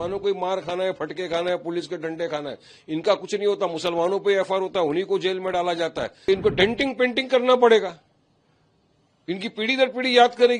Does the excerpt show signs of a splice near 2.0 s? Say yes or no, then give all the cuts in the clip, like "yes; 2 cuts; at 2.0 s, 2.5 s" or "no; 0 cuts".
no; 1 cut; at 6.3 s